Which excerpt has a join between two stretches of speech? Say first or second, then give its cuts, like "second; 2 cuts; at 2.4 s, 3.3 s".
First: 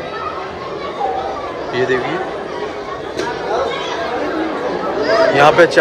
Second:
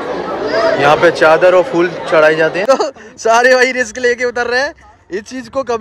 second; 1 cut; at 2.7 s